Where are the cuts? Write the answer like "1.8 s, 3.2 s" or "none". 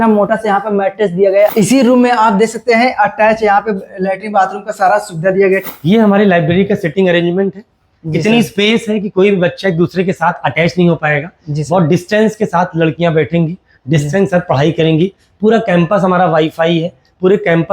1.5 s, 5.7 s